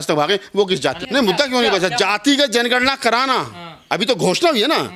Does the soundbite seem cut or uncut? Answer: cut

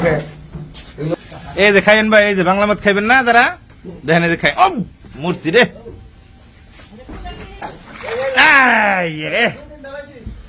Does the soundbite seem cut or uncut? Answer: cut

